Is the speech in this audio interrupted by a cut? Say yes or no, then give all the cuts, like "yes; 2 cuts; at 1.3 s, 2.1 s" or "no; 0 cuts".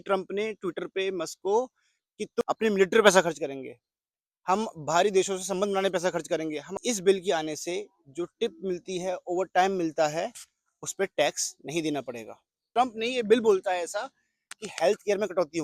yes; 3 cuts; at 2.4 s, 6.7 s, 12.6 s